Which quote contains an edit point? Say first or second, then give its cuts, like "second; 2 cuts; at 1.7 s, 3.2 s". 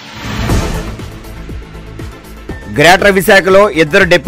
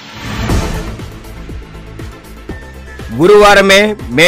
first; 1 cut; at 2.6 s